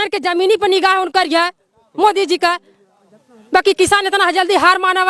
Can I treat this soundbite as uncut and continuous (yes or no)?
yes